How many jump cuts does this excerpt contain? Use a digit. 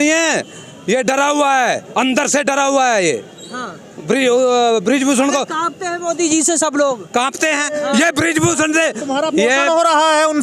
0